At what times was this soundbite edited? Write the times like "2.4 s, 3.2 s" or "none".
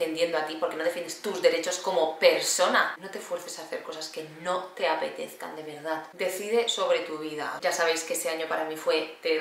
3.0 s, 7.6 s